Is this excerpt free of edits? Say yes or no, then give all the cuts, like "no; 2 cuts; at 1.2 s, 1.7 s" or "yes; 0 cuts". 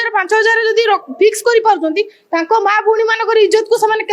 yes; 0 cuts